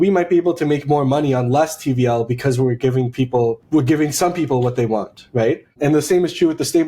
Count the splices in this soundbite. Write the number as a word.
two